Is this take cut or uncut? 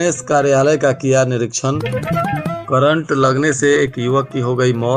uncut